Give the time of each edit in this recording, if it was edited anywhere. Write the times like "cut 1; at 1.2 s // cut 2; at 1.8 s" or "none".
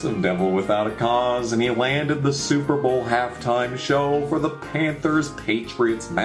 cut 1; at 1.1 s